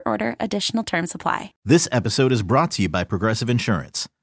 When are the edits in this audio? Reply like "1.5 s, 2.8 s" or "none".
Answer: 1.5 s